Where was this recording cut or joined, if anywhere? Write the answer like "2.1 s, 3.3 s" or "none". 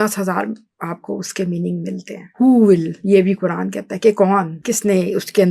2.3 s, 4.6 s